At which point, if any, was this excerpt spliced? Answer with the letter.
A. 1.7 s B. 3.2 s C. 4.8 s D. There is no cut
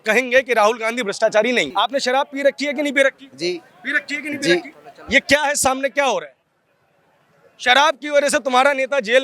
A